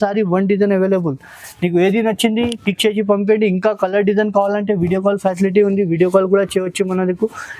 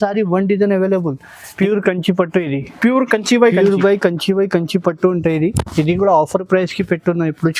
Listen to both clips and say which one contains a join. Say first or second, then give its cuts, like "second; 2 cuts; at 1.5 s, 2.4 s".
second; 1 cut; at 1.5 s